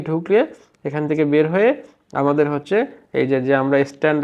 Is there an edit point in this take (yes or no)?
no